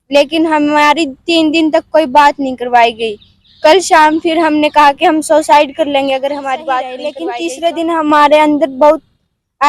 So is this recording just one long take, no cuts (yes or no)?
no